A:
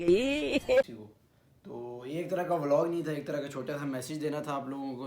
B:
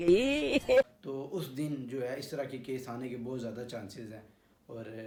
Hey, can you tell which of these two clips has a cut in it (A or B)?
A